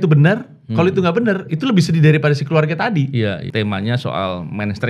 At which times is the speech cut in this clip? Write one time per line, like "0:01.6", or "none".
0:03.4